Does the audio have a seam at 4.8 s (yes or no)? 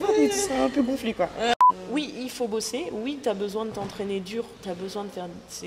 no